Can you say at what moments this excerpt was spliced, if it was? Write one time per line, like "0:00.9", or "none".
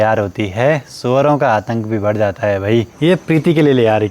0:02.9